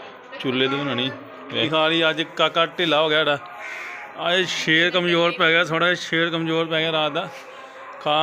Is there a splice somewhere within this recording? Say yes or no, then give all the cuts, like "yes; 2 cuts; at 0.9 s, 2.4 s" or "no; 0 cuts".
yes; 1 cut; at 1.7 s